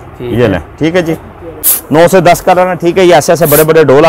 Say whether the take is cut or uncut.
cut